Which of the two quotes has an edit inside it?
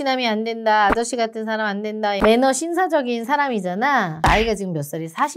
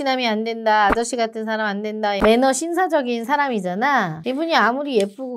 first; 1 cut; at 4.2 s

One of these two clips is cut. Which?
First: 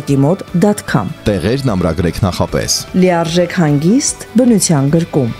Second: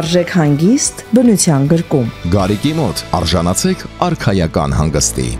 first; 1 cut; at 1.1 s

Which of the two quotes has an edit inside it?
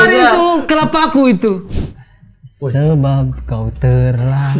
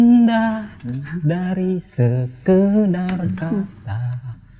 first; 1 cut; at 1.7 s

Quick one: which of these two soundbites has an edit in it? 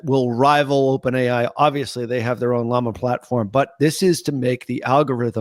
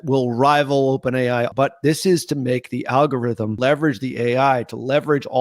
second; 2 cuts; at 1.5 s, 3.6 s

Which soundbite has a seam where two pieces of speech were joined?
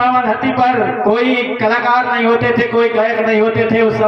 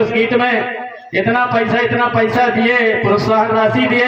first; 1 cut; at 1.0 s

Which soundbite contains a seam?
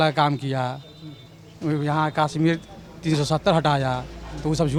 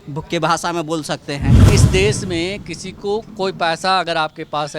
second; 1 cut; at 1.6 s

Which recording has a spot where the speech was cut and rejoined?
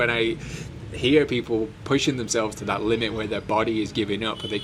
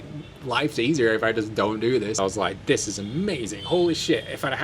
second; 1 cut; at 2.2 s

